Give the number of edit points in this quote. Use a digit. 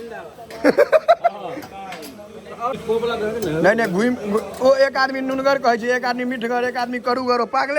1